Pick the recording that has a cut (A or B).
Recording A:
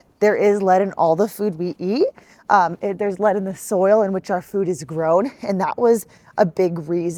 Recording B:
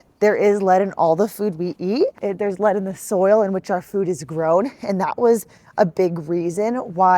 B